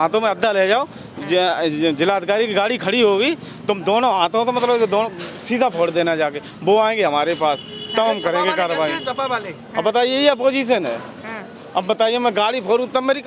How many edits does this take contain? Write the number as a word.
zero